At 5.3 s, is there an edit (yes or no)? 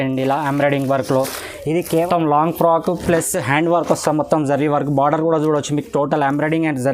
no